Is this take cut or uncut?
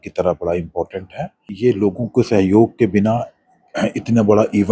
cut